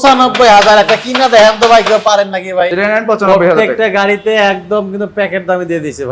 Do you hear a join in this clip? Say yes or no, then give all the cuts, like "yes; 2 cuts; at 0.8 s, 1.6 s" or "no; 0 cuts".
yes; 1 cut; at 2.7 s